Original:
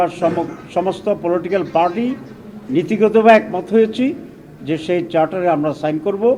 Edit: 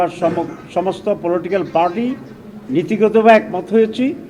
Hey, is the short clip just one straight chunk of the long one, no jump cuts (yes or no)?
yes